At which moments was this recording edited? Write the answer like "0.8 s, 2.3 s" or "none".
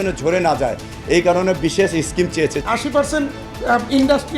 2.6 s